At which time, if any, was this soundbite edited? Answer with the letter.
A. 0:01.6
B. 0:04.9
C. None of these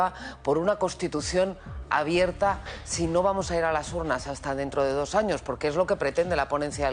C